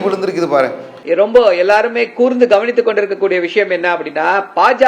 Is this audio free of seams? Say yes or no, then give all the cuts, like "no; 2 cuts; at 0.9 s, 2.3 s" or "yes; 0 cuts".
no; 1 cut; at 0.9 s